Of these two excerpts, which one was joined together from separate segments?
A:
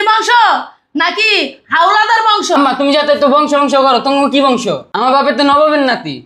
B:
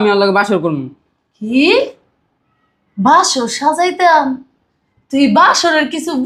A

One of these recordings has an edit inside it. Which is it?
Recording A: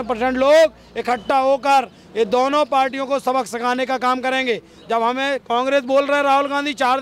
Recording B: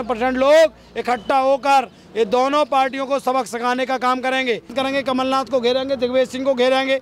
B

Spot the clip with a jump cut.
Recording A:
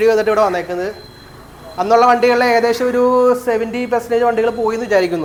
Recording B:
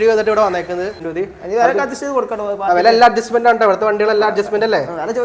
B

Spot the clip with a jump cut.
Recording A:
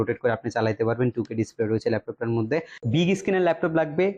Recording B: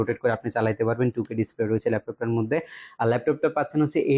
A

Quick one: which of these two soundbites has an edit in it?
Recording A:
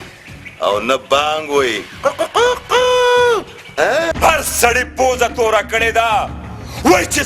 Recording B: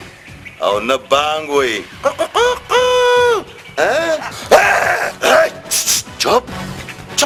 A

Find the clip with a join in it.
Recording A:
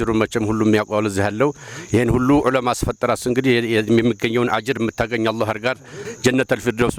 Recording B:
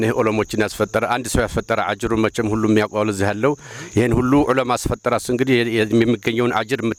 A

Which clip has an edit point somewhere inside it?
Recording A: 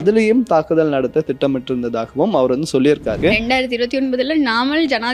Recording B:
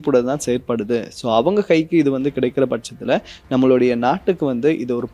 A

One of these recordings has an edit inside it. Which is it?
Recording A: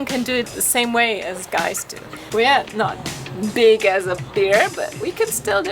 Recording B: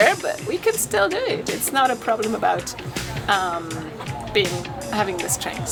A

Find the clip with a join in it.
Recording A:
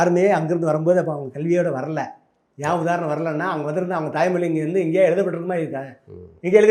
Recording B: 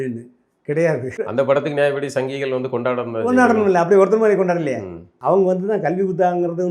B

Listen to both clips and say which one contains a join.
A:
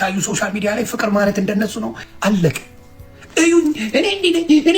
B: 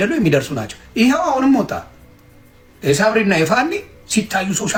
A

